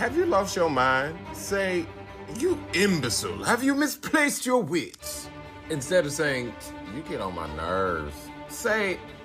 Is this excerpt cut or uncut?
uncut